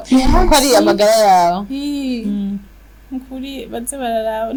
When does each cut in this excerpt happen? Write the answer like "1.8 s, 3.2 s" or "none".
none